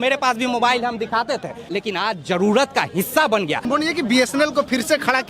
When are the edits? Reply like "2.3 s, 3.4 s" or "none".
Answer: 1.6 s, 3.7 s